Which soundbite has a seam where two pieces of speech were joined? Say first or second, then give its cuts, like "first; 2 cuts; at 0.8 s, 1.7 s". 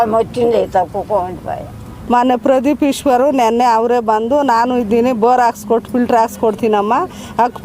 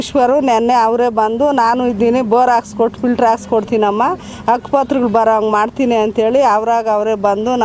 first; 1 cut; at 1.9 s